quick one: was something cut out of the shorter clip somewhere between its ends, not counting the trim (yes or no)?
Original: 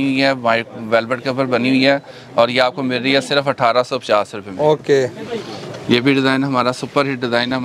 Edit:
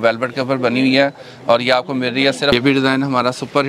yes